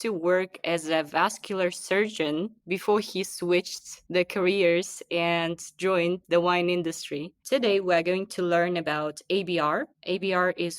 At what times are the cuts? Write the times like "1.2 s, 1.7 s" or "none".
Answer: 7.3 s